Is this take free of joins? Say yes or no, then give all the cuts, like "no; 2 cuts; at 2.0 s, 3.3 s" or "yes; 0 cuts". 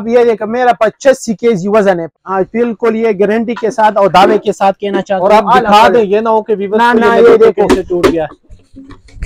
yes; 0 cuts